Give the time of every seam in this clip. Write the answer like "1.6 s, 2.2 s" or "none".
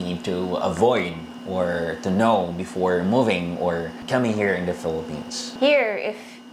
none